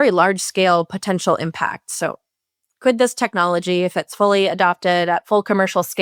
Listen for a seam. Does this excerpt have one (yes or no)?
no